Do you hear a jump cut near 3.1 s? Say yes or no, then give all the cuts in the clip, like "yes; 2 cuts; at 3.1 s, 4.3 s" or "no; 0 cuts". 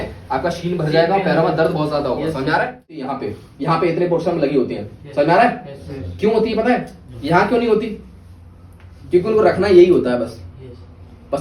yes; 1 cut; at 3.1 s